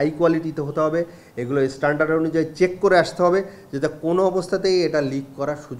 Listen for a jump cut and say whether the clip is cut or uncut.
uncut